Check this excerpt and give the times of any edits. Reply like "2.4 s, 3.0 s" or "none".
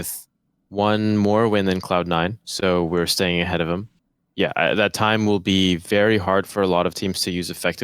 3.9 s